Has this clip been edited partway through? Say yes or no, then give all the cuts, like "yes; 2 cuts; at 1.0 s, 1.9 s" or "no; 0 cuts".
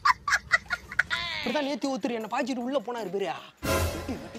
yes; 1 cut; at 1.2 s